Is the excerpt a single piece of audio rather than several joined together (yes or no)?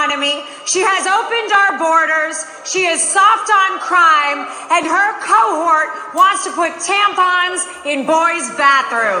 yes